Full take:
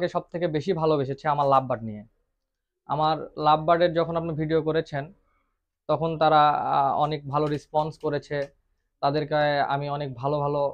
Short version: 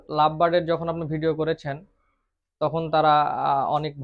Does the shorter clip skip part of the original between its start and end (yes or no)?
no